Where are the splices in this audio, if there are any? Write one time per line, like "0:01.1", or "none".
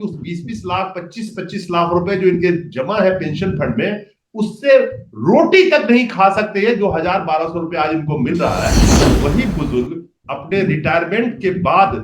0:08.9

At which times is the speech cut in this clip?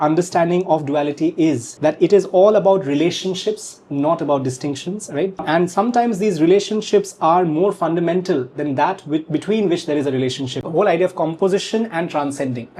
0:01.7
0:05.4
0:10.6

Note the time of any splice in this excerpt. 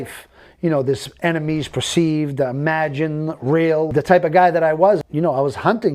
0:05.0

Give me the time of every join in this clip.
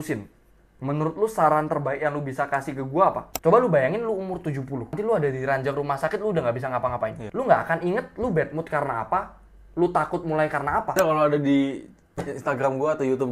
0:03.3
0:04.9
0:07.2
0:11.0

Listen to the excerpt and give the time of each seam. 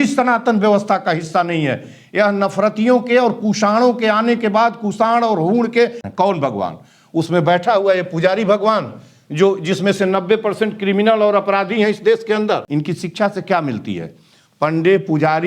0:06.0
0:12.7

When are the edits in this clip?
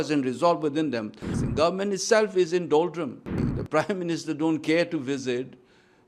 0:01.3
0:03.4

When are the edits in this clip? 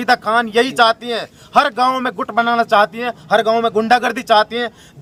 none

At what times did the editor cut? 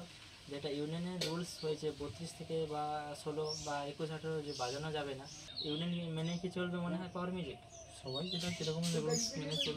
0:05.5

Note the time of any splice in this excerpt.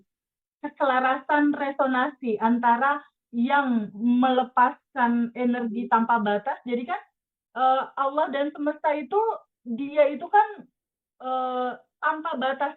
none

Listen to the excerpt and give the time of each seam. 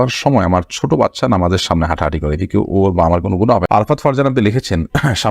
0:03.6

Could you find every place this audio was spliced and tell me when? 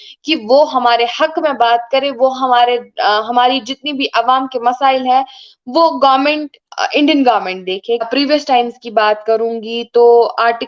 0:08.1

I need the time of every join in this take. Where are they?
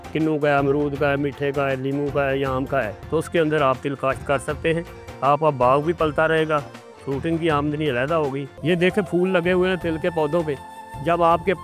0:03.0
0:08.5

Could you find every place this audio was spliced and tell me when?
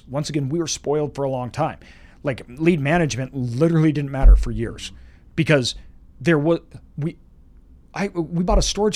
none

